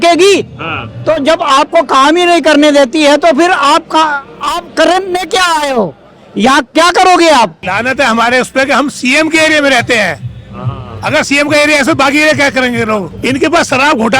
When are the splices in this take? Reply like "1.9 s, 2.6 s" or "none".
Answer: 7.6 s, 13.1 s